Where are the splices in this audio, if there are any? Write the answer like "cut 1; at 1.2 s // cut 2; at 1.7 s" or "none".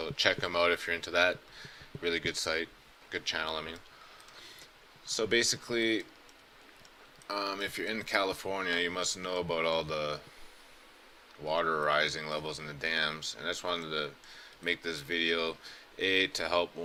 none